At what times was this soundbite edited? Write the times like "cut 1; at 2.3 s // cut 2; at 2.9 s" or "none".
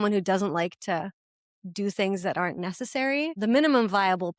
cut 1; at 3.4 s